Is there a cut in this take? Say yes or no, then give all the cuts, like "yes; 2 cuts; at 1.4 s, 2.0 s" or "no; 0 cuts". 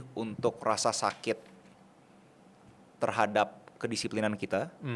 no; 0 cuts